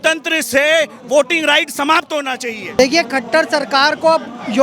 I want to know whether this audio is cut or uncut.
cut